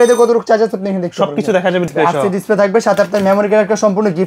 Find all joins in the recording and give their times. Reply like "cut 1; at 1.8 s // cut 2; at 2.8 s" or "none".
cut 1; at 1.9 s